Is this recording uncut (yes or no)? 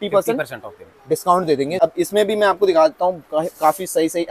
no